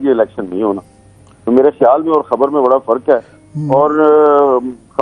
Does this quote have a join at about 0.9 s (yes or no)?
no